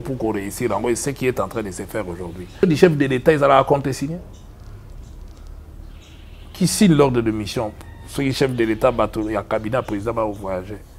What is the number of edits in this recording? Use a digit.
1